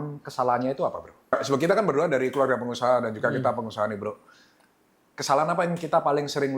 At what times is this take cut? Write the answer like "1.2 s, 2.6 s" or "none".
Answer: 1.3 s